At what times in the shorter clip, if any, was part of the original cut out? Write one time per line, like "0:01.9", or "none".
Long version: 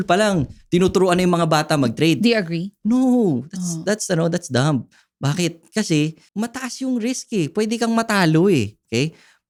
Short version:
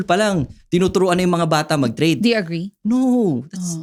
none

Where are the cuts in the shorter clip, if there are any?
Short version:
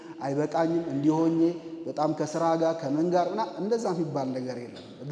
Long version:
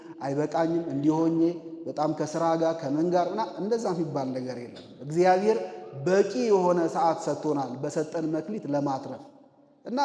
none

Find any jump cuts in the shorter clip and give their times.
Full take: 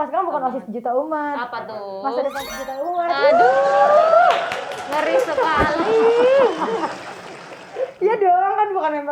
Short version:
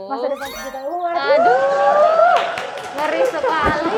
none

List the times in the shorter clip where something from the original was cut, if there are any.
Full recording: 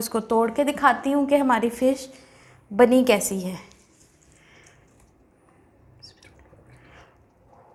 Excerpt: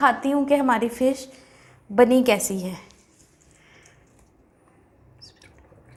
none

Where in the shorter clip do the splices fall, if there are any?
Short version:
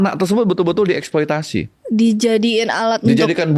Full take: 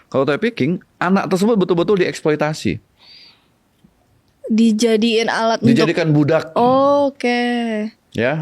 0:01.8

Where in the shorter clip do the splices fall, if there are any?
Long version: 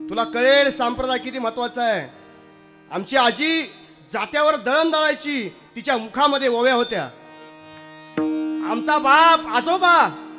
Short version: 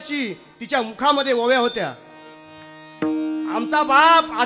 none

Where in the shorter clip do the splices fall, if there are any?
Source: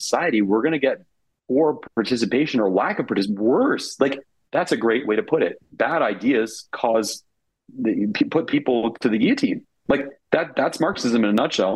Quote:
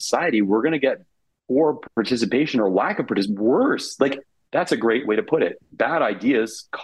none

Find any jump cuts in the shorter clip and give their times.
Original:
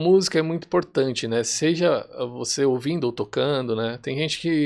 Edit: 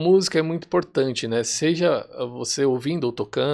none

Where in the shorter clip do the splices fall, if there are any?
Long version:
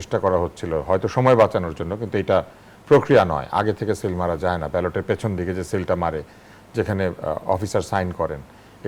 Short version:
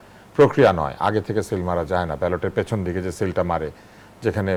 none

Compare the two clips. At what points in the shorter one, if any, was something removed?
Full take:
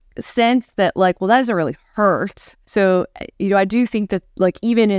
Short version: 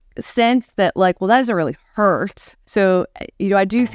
none

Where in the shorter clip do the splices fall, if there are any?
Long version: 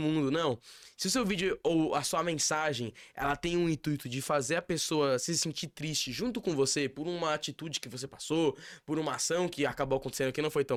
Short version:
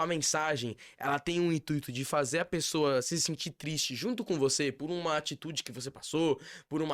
none

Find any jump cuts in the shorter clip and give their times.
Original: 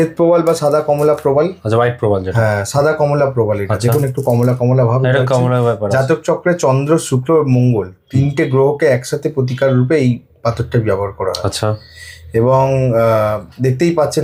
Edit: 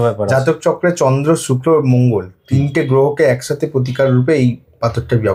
none

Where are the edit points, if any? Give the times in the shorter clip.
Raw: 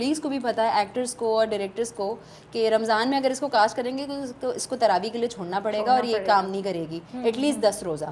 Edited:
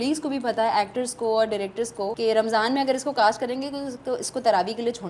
0:02.1

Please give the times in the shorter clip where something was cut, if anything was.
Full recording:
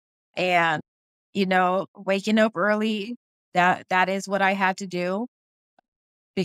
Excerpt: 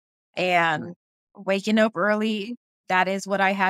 0:01.3
0:02.8

